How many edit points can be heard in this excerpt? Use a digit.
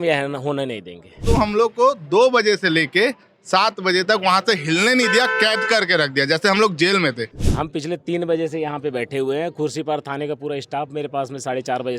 2